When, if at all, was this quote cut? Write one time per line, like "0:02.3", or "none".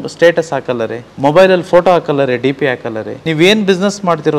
0:01.0
0:03.1